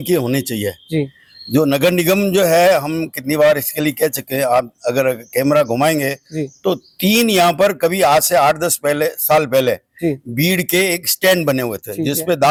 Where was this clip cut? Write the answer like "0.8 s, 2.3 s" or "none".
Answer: none

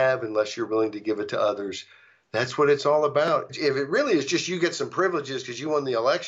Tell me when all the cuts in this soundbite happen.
3.5 s

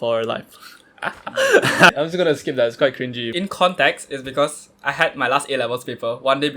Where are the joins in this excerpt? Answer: 1.9 s, 3.2 s

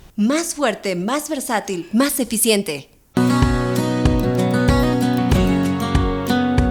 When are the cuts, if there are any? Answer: none

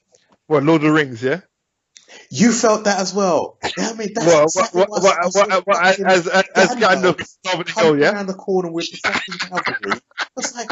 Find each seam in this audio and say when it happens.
none

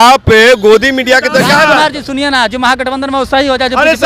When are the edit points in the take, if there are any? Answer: 1.7 s

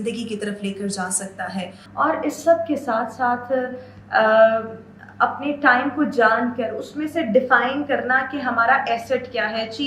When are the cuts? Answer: 1.8 s

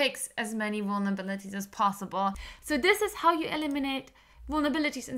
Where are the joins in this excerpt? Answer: 2.5 s

